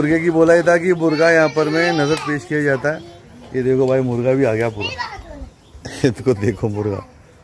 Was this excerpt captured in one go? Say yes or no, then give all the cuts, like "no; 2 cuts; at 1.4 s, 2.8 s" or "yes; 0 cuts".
yes; 0 cuts